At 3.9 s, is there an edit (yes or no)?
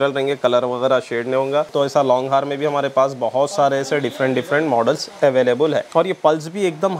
no